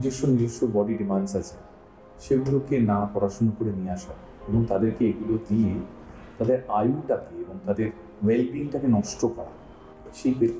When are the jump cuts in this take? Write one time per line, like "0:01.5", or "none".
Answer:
none